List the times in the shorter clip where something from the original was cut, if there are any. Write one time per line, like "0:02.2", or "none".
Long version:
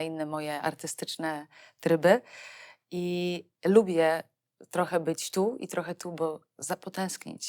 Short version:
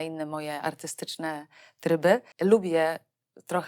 0:02.3